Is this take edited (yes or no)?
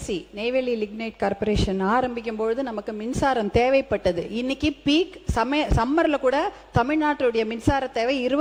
no